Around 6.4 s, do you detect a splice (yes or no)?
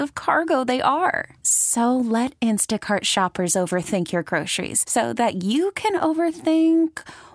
no